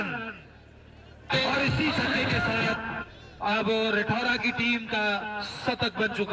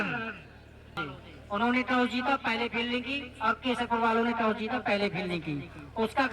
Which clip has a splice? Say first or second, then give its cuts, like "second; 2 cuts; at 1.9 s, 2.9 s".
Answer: second; 1 cut; at 1.1 s